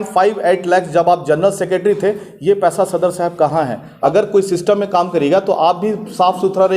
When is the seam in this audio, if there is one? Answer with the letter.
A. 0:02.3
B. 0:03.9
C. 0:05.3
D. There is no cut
B